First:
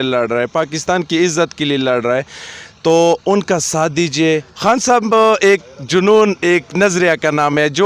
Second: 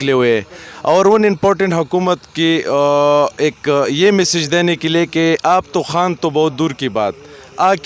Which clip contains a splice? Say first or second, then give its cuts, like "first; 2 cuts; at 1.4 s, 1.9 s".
first; 1 cut; at 4.5 s